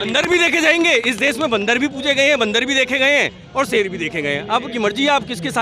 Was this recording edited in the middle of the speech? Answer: no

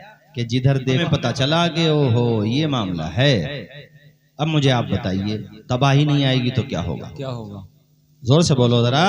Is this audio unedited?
no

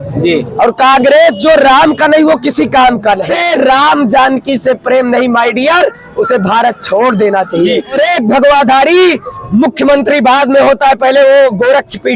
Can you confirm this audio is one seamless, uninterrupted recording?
no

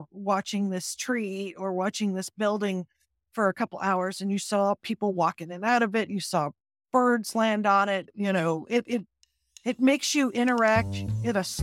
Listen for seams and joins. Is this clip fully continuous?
no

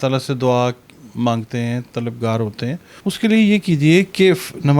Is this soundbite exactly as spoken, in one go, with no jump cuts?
no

